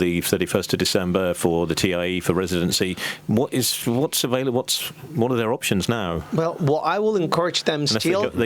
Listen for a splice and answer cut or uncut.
uncut